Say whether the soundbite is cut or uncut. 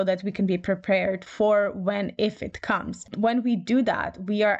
cut